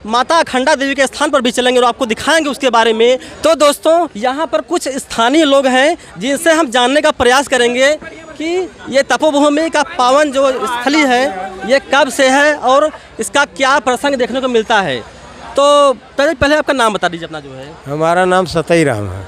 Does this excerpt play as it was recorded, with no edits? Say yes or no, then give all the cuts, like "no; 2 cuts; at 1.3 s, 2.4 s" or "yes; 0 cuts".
yes; 0 cuts